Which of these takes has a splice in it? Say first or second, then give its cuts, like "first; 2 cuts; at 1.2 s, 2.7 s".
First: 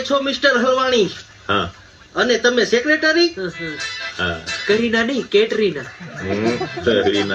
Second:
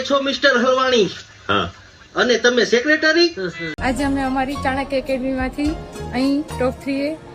second; 1 cut; at 3.7 s